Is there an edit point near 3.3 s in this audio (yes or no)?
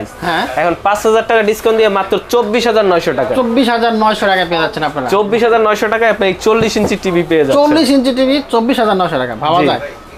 no